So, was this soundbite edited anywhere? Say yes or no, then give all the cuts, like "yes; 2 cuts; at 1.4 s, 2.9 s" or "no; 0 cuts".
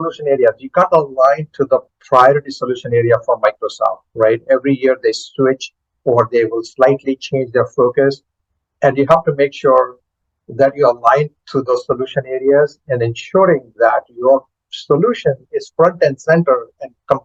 no; 0 cuts